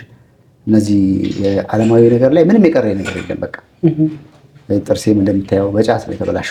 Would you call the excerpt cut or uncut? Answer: uncut